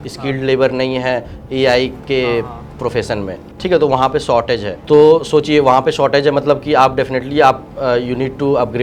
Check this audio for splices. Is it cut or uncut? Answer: cut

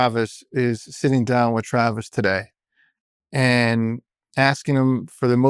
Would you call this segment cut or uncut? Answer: uncut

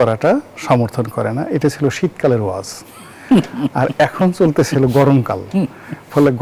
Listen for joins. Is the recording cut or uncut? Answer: uncut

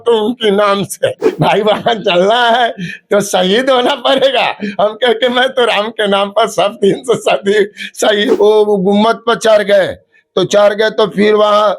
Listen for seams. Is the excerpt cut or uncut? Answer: cut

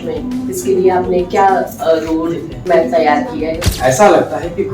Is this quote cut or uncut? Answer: cut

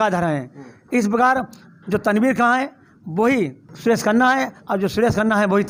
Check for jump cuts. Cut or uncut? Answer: uncut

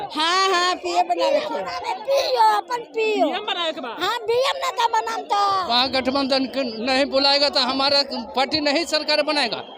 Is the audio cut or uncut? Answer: cut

